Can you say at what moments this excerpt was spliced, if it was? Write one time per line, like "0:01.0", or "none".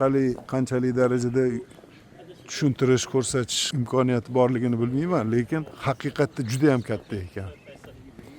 0:03.6
0:05.7